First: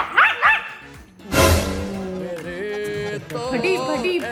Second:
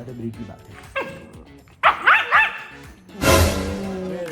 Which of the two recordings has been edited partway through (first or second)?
second